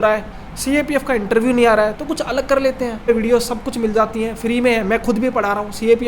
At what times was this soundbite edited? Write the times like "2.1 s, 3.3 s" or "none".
3.0 s